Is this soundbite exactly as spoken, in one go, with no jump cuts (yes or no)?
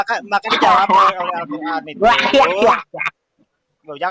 yes